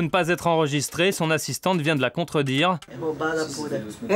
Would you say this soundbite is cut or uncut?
cut